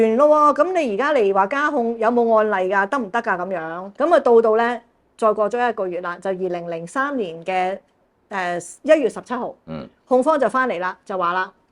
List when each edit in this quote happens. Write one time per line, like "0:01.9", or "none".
0:03.8